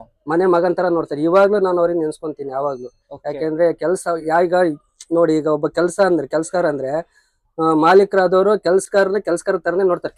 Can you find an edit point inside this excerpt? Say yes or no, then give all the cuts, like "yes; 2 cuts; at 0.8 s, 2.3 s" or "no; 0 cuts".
no; 0 cuts